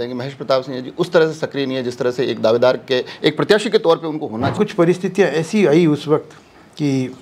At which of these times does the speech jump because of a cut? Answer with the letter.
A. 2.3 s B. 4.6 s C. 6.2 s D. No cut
B